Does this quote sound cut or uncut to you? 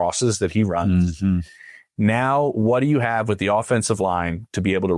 uncut